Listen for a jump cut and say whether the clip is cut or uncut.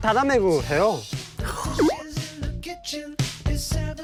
uncut